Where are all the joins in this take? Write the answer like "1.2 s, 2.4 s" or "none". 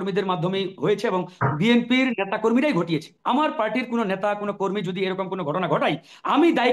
3.1 s